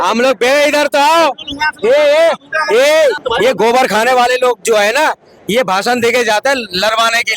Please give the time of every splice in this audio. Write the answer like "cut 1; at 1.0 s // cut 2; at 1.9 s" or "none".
cut 1; at 3.2 s